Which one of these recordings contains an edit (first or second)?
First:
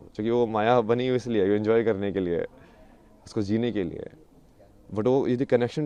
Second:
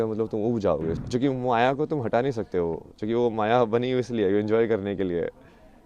second